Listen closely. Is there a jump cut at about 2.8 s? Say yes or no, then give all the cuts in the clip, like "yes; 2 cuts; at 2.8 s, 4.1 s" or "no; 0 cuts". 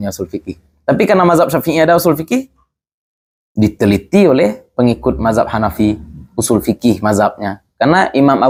no; 0 cuts